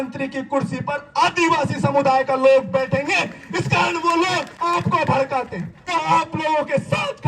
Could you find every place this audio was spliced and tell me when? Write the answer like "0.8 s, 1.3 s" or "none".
4.5 s, 5.8 s